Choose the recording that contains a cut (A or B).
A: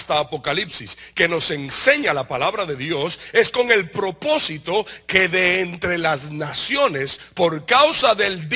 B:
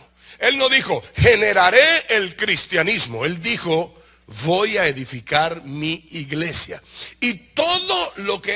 A